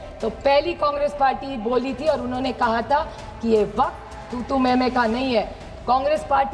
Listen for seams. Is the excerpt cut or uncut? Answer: uncut